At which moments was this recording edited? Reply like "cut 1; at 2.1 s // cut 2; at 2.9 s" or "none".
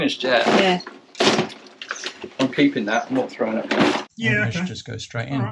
cut 1; at 4.1 s